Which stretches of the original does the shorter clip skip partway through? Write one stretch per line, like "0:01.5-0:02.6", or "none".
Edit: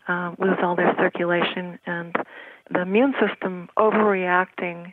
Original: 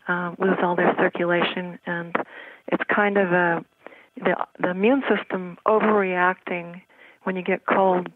0:02.6-0:04.5

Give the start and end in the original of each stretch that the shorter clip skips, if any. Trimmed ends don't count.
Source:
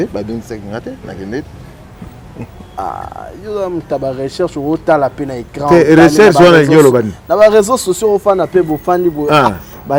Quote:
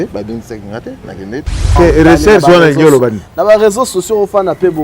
0:01.7-0:05.7

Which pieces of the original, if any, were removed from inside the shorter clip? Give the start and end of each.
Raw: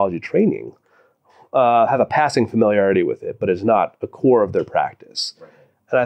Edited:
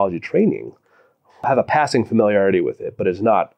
0:01.5-0:01.9

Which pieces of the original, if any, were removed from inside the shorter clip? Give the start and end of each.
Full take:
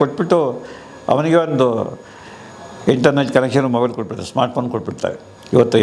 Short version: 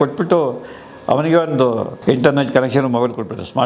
0:01.9-0:02.7

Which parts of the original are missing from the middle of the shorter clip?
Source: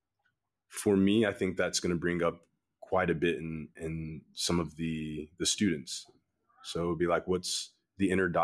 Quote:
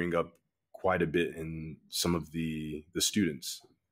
0:03.4-0:03.8

